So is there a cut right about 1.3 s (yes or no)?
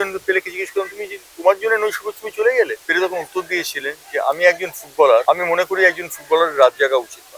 no